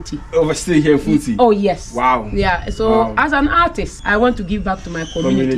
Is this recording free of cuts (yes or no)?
no